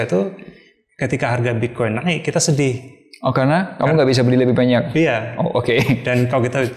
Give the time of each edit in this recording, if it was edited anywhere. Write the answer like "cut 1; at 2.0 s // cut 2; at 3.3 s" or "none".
none